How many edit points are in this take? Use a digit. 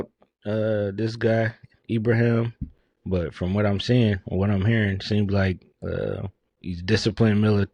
0